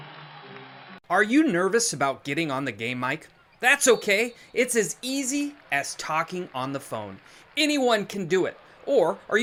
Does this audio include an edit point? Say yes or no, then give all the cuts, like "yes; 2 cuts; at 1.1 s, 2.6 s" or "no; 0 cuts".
no; 0 cuts